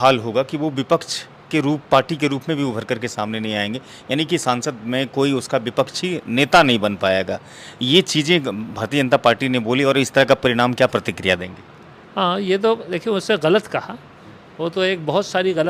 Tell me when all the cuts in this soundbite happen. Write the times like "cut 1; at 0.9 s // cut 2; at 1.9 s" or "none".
none